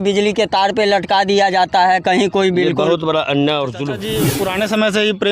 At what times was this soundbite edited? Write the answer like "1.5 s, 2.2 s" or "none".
4.2 s